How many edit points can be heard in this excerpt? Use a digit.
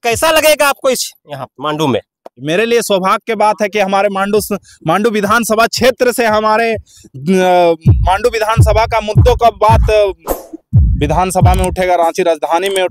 0